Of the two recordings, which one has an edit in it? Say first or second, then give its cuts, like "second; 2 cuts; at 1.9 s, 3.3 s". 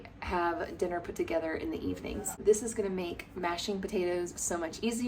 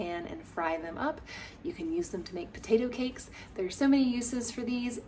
first; 1 cut; at 2.4 s